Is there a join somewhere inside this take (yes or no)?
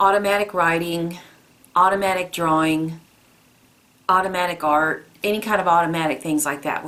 no